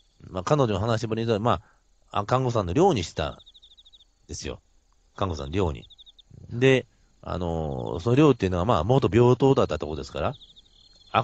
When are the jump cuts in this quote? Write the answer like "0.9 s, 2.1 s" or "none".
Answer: 9.6 s